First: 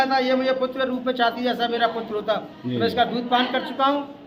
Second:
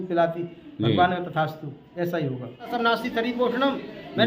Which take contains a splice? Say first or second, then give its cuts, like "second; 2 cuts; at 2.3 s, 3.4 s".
second; 1 cut; at 2.7 s